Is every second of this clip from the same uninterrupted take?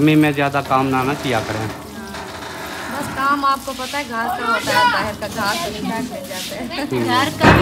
yes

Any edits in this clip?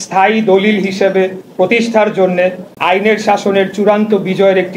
yes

